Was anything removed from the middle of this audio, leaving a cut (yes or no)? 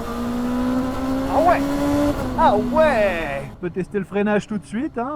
no